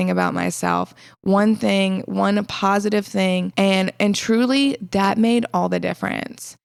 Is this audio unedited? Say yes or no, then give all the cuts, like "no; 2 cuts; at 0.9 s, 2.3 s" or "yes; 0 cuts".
yes; 0 cuts